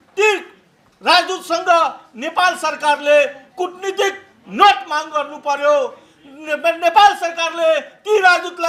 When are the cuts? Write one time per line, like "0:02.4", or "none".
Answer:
none